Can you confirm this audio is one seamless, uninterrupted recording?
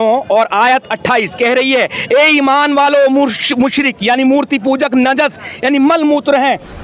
yes; 0 cuts

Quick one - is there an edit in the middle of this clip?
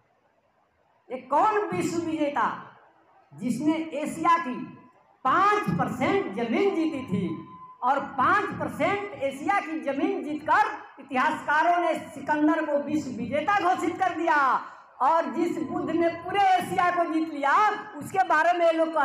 no; 0 cuts

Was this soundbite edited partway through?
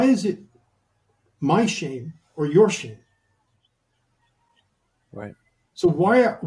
yes; 1 cut; at 3.7 s

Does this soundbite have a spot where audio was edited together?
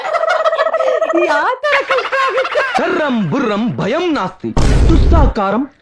yes; 1 cut; at 2.8 s

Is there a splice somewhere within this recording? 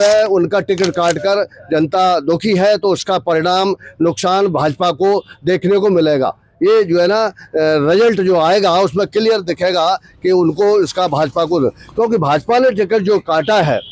no; 0 cuts

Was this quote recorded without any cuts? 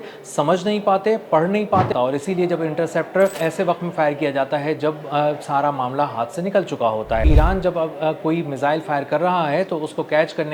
no; 3 cuts; at 1.9 s, 3.4 s, 7.2 s

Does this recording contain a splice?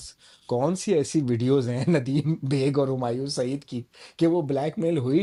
no; 0 cuts

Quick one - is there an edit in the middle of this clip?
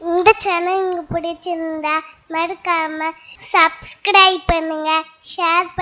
no; 0 cuts

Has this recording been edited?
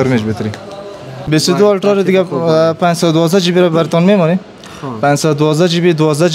yes; 1 cut; at 1.2 s

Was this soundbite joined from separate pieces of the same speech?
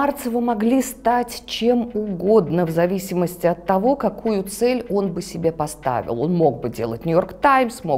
no; 0 cuts

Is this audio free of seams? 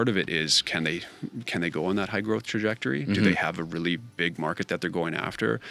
yes; 0 cuts

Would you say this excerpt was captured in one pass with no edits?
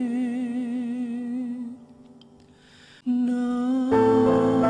no; 1 cut; at 3.0 s

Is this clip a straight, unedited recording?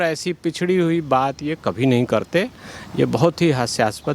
yes; 0 cuts

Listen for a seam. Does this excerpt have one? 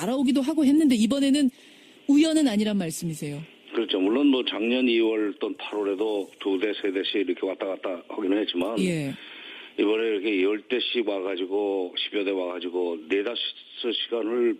no; 0 cuts

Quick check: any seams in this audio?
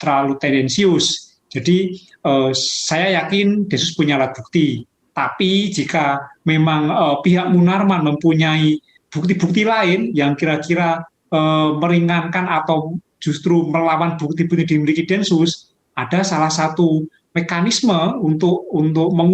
yes; 1 cut; at 8.9 s

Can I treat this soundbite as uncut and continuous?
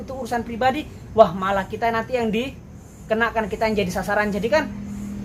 yes; 0 cuts

